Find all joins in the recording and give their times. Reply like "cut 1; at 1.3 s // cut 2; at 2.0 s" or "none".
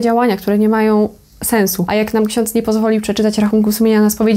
cut 1; at 1.8 s